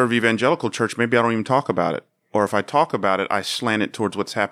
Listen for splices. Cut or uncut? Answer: uncut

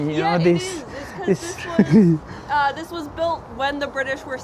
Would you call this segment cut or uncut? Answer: uncut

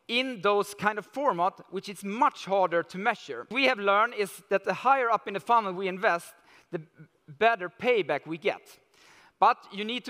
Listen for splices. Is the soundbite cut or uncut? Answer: cut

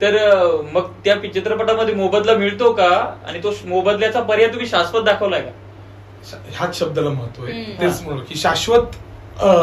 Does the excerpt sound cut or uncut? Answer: uncut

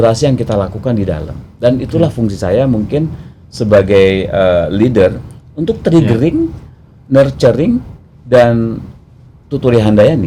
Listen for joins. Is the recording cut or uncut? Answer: uncut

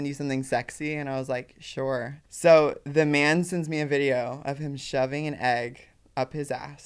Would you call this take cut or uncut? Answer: cut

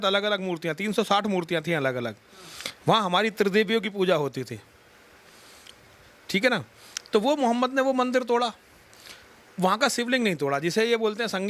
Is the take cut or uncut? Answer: uncut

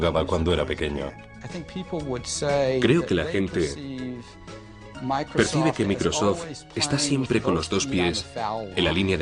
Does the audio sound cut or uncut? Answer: cut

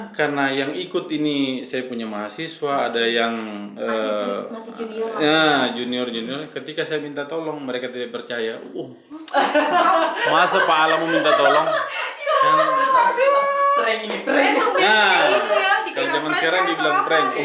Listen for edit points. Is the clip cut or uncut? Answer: uncut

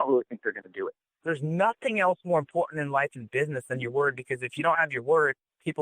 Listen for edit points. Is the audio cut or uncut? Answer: uncut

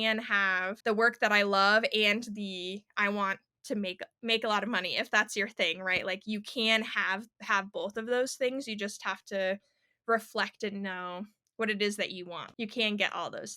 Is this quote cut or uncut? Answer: cut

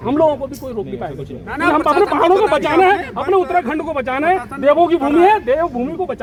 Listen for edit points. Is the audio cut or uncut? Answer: uncut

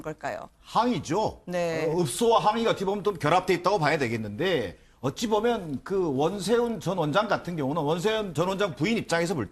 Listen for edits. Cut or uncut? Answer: uncut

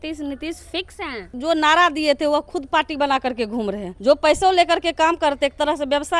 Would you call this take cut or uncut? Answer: cut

